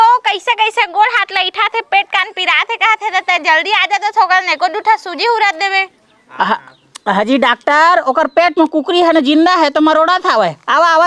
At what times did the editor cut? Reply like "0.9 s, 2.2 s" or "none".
none